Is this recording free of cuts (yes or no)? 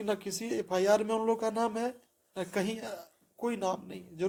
yes